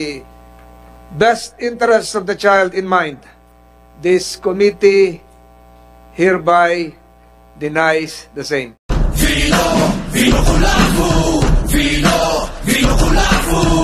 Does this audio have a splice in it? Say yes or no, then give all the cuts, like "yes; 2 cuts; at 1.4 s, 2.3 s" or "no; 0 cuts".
no; 0 cuts